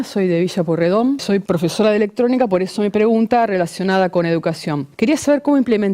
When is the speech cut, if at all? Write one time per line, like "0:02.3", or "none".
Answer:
0:01.2
0:04.9